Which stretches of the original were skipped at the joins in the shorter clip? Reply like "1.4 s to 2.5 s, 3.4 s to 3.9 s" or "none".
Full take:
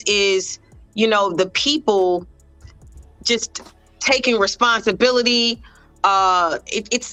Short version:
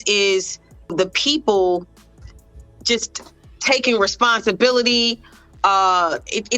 0.9 s to 1.3 s